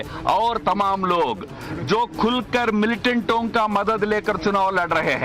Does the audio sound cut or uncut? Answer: uncut